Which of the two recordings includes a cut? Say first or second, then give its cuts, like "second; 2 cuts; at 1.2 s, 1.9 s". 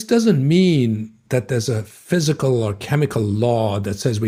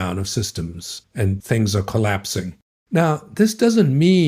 second; 2 cuts; at 1.3 s, 2.5 s